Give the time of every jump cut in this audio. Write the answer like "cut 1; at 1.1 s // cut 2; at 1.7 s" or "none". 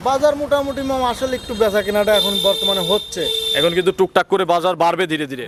none